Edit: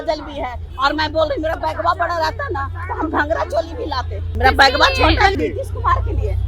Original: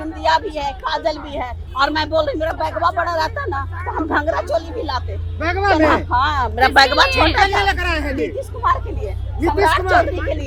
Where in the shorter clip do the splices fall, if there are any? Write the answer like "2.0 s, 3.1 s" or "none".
4.3 s, 5.3 s